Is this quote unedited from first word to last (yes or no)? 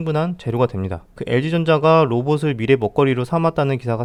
yes